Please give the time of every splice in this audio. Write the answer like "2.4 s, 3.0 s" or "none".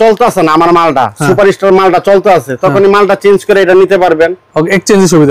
none